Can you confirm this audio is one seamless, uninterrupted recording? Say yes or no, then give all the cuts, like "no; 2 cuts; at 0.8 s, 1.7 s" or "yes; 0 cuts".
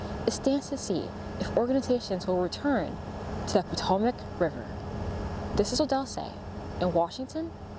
yes; 0 cuts